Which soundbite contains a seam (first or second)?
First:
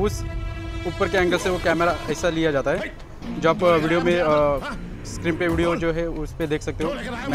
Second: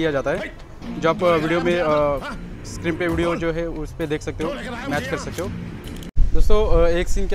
second